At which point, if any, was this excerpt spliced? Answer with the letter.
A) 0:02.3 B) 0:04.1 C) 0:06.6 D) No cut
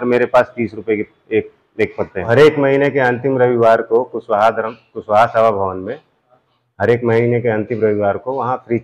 A